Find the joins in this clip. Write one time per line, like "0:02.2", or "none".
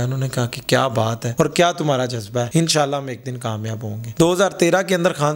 0:01.2
0:02.5
0:04.1

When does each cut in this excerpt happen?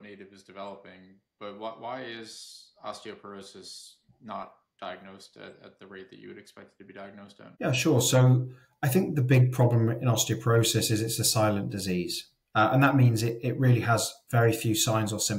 0:07.4

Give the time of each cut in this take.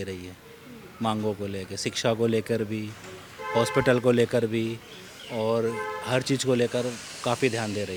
none

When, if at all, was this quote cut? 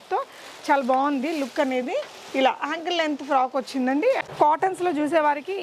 0:04.2

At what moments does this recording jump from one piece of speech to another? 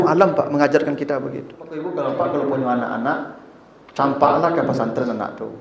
0:01.8

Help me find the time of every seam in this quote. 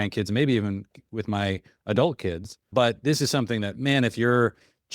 0:02.7

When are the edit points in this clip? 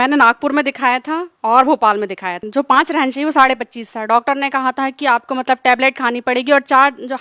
0:01.3
0:02.4

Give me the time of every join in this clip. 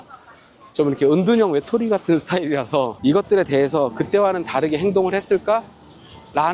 0:02.9

